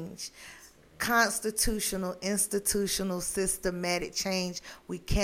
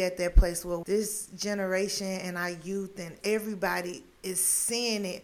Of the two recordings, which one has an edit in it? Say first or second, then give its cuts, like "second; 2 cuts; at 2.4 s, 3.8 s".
second; 2 cuts; at 0.8 s, 3.1 s